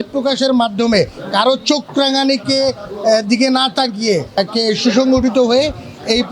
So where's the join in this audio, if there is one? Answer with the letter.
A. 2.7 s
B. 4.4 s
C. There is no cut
B